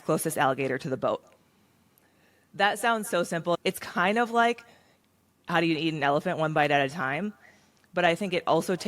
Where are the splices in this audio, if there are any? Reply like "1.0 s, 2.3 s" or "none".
3.6 s